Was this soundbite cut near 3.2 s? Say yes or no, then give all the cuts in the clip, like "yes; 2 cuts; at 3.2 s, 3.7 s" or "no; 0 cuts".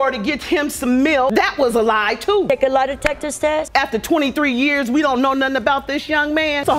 no; 1 cut; at 1.3 s